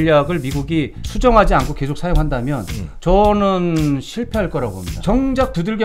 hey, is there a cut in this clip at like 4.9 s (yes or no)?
yes